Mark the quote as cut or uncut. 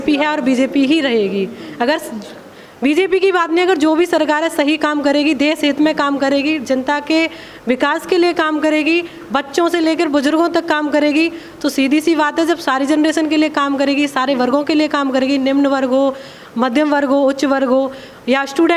uncut